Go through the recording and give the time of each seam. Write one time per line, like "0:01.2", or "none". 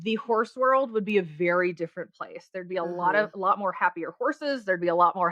none